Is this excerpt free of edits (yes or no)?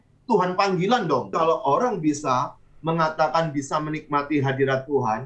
no